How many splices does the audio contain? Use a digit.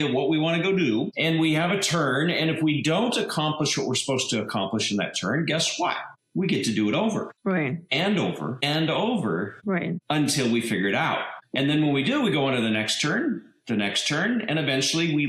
1